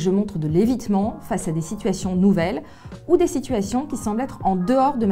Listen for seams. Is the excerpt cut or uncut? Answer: uncut